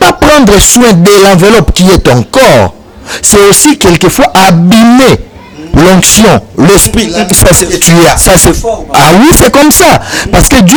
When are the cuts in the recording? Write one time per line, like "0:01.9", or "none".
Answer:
none